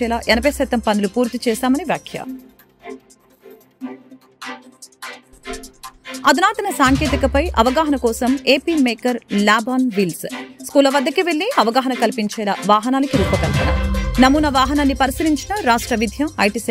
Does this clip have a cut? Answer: no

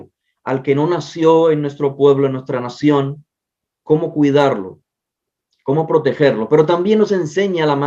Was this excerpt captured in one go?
yes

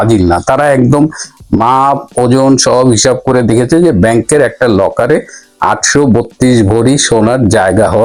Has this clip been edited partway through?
no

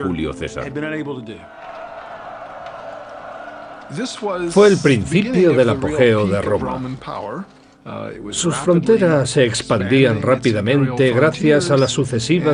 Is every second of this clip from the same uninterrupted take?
yes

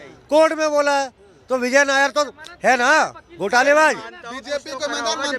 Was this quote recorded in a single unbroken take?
yes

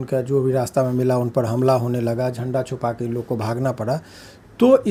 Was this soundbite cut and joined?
no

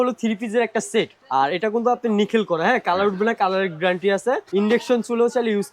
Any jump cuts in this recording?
yes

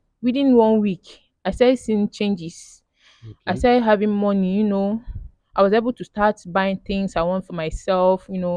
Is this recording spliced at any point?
no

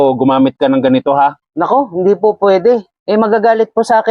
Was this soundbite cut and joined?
yes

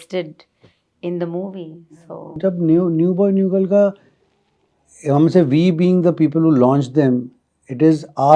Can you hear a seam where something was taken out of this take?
no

